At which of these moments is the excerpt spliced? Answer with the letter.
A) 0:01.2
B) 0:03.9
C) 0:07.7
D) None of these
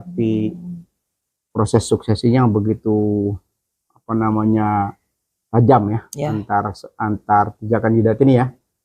D